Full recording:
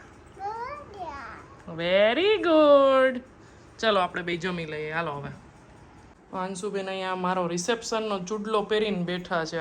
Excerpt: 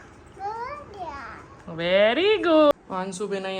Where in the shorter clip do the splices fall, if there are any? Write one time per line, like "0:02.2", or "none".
0:02.7